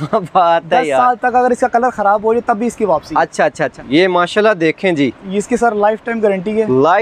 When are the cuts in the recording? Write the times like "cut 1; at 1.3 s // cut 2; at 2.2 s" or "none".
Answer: cut 1; at 3.7 s